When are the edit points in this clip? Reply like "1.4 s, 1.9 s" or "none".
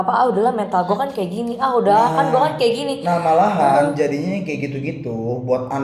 none

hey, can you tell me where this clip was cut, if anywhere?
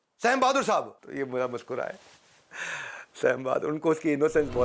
1.0 s

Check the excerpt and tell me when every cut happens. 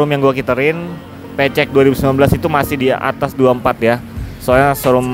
none

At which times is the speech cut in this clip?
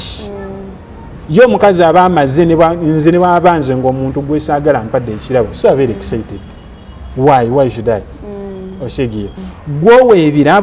9.4 s

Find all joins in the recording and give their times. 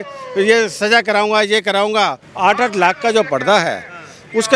2.2 s

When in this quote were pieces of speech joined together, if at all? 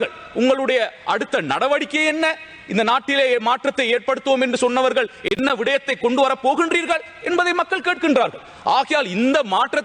none

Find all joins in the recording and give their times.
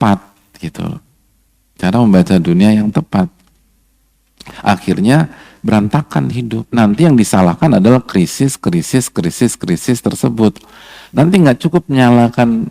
6.6 s

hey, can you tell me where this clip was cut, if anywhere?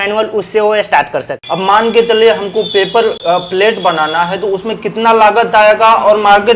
1.4 s, 3.2 s

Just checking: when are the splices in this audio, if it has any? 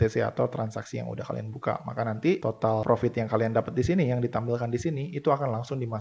none

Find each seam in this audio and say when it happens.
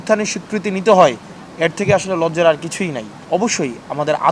3.1 s

